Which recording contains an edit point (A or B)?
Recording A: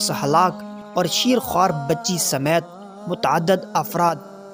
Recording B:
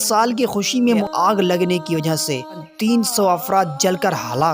B